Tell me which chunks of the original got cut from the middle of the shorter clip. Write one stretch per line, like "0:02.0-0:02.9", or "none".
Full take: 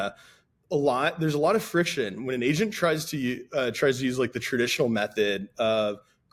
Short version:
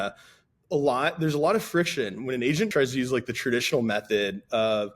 0:02.7-0:03.8